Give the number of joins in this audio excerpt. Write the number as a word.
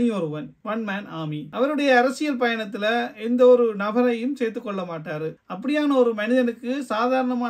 one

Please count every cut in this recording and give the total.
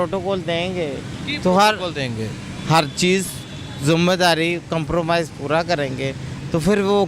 zero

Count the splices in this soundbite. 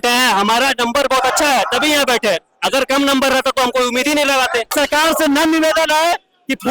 one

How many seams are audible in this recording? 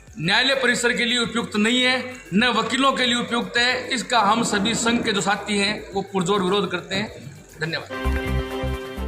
one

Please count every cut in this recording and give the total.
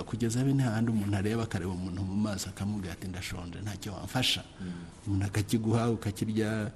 zero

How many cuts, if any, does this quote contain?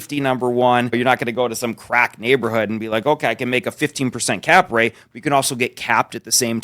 one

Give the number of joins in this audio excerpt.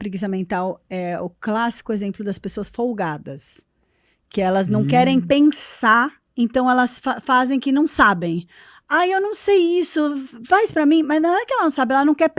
zero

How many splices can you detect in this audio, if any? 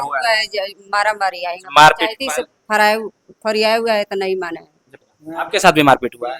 one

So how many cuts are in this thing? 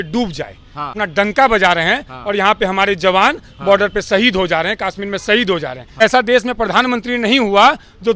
two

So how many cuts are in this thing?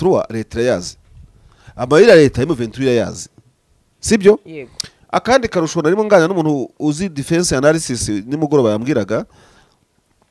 zero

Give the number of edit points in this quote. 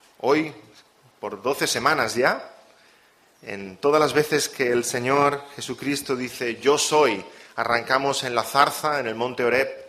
one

